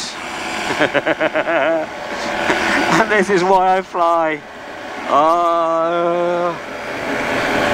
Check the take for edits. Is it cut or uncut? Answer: uncut